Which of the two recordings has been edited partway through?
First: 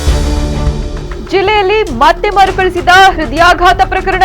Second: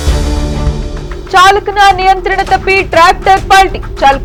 first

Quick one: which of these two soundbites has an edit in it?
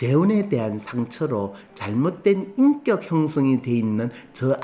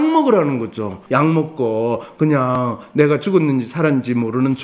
second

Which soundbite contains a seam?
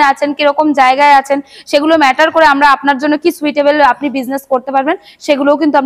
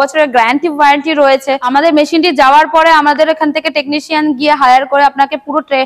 second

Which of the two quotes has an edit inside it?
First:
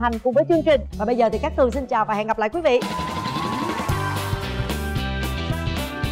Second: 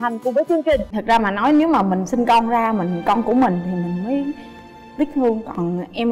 second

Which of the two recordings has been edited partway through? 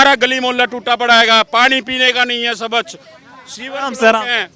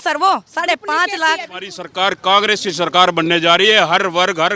second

